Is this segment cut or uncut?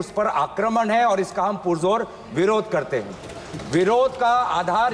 uncut